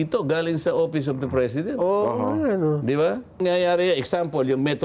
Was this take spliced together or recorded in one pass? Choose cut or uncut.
cut